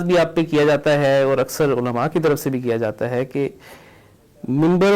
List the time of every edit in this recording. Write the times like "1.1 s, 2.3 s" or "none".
none